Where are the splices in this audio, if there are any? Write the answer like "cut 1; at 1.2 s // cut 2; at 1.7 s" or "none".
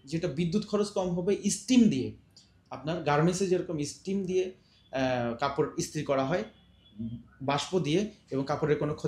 none